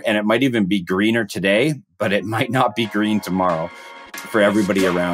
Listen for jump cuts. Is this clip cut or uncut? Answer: cut